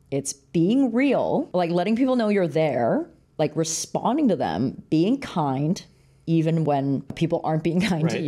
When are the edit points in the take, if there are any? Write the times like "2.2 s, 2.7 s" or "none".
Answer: 1.5 s, 7.1 s